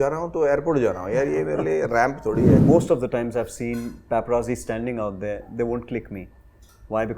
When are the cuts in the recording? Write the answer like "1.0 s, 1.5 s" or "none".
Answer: 2.6 s